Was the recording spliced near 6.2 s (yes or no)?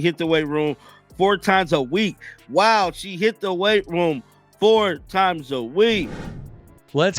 yes